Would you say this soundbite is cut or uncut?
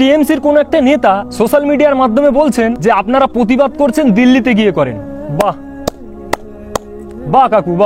cut